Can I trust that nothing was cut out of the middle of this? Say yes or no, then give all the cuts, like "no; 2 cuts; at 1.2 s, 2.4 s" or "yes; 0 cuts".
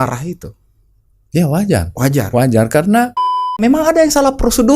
no; 1 cut; at 3.6 s